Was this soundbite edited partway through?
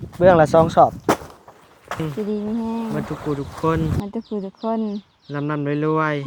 yes; 1 cut; at 2.0 s

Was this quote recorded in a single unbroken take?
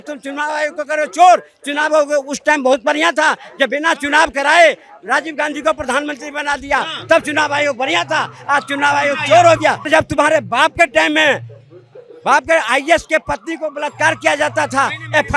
no; 1 cut; at 9.9 s

